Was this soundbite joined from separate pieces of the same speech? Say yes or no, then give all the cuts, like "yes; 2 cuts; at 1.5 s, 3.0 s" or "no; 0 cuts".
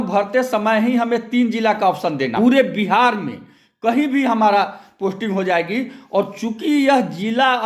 yes; 1 cut; at 2.3 s